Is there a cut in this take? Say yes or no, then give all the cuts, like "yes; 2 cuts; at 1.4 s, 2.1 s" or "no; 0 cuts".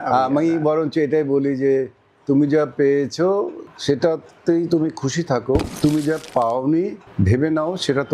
yes; 3 cuts; at 3.7 s, 5.7 s, 7.0 s